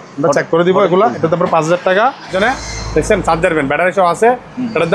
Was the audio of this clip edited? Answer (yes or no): yes